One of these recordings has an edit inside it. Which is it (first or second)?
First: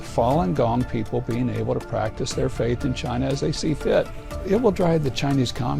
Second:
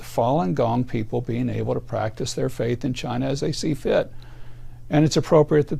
first